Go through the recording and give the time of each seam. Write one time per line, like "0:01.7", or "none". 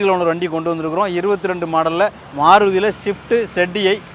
0:02.2